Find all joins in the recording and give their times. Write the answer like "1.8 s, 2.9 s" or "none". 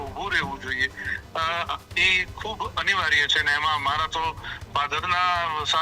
none